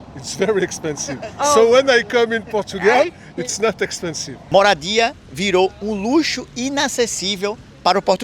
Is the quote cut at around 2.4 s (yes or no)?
no